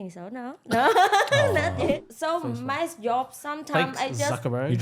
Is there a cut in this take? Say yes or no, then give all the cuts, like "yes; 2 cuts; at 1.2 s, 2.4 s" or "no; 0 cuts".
yes; 1 cut; at 2.0 s